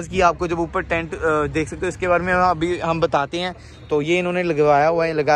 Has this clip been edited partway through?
no; 0 cuts

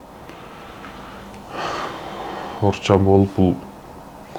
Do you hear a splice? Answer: no; 0 cuts

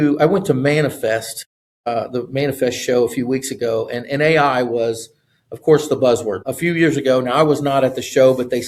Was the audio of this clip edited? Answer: no; 0 cuts

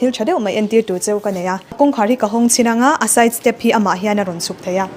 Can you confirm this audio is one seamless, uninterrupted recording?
no; 1 cut; at 1.7 s

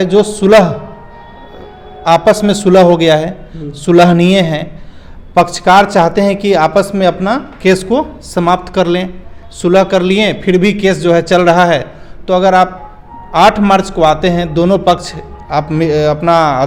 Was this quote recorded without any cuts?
yes; 0 cuts

